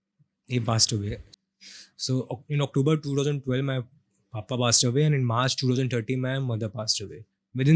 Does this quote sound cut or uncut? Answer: cut